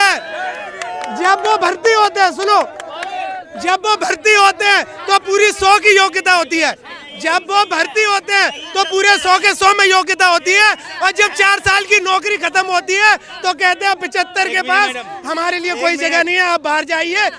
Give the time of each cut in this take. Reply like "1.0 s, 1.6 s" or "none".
none

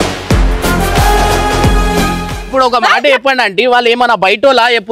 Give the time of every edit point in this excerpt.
2.5 s

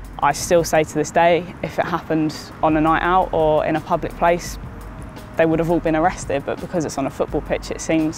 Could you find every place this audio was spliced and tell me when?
none

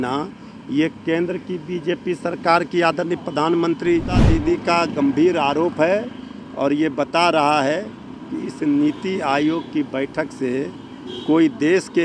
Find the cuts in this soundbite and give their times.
4.3 s

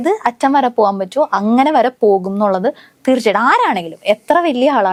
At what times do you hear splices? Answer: none

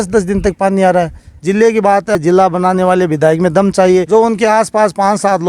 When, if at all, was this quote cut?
1.3 s, 2.2 s, 4.1 s

